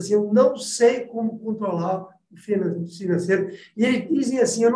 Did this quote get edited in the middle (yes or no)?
no